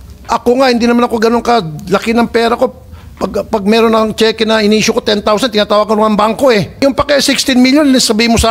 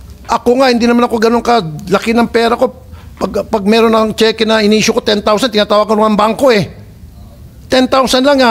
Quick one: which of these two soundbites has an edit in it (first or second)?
first